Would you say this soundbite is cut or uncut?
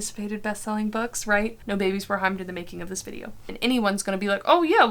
cut